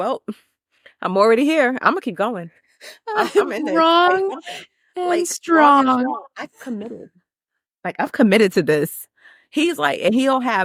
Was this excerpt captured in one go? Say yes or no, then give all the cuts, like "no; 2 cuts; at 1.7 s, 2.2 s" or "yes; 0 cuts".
yes; 0 cuts